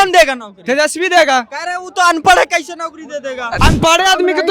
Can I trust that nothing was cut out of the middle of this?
no; 1 cut; at 3.6 s

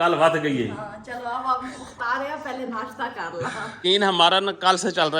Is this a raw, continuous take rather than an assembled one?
no; 1 cut; at 3.7 s

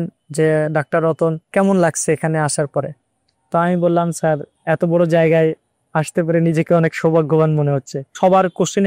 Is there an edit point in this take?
yes; 3 cuts; at 1.4 s, 4.5 s, 8.1 s

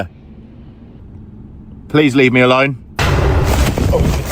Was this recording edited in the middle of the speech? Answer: yes; 1 cut; at 1.0 s

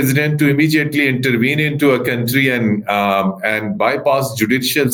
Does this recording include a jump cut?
no; 0 cuts

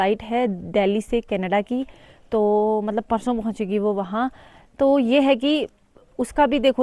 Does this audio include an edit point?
no; 0 cuts

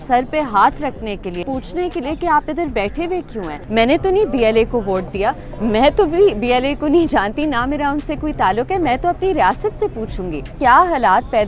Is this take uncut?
no; 3 cuts; at 1.4 s, 3.6 s, 10.5 s

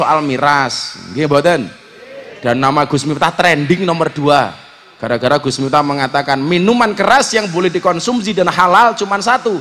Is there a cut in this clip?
no; 0 cuts

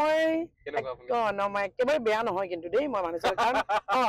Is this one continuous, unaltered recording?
yes; 0 cuts

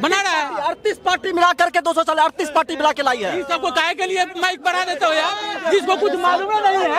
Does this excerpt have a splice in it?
no; 0 cuts

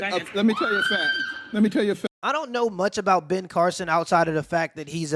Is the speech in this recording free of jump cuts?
yes; 0 cuts

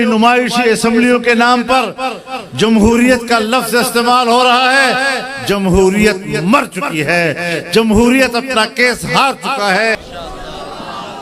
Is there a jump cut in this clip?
yes; 1 cut; at 9.9 s

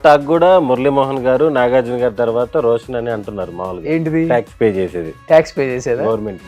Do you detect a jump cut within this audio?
no; 0 cuts

